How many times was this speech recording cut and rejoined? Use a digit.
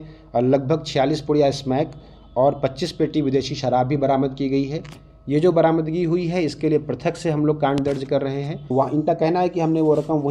1